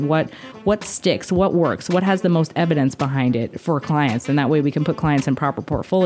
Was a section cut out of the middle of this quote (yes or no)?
no